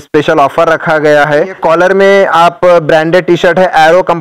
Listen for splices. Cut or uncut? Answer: cut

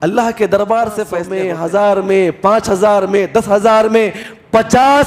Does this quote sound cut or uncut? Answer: cut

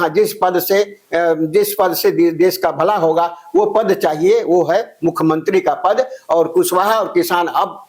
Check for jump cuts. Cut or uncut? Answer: uncut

